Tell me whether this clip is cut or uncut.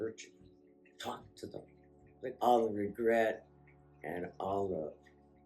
cut